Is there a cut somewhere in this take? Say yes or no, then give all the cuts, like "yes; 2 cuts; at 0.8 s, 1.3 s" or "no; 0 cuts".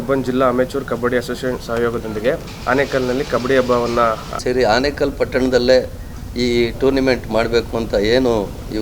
yes; 2 cuts; at 2.5 s, 4.4 s